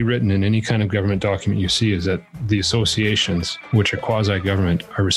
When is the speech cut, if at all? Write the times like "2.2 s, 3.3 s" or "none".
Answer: none

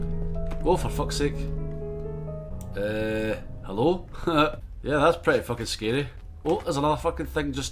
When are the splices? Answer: 2.5 s, 4.7 s, 6.2 s

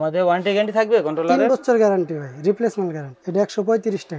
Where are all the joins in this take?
3.2 s

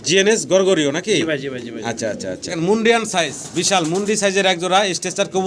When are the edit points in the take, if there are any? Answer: 2.4 s

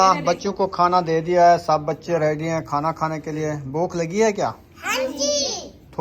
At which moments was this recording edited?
none

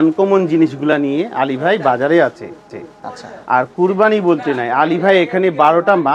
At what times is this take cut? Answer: none

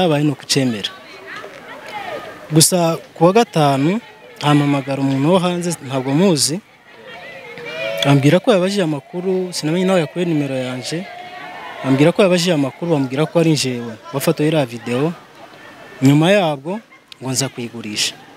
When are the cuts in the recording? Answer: none

